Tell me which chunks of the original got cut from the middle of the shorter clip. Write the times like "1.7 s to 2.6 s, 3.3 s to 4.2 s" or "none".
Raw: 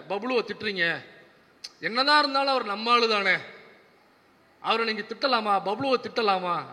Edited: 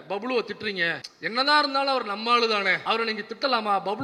1.1 s to 1.7 s, 3.4 s to 4.6 s